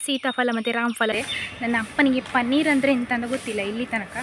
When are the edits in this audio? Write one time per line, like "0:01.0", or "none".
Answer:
0:01.1